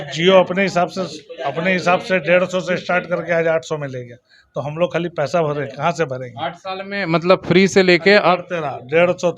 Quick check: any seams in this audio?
no; 0 cuts

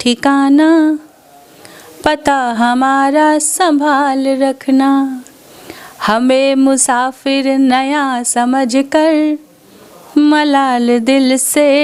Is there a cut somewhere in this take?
no; 0 cuts

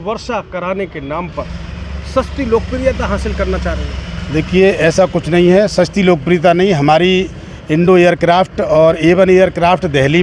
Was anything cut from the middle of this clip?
no; 0 cuts

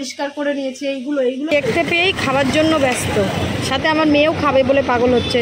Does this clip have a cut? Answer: yes; 1 cut; at 1.5 s

